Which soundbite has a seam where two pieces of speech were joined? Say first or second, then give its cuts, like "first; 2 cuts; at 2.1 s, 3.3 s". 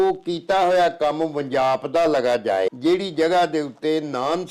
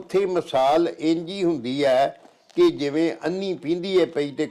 first; 1 cut; at 2.7 s